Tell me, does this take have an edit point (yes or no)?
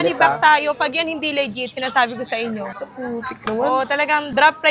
yes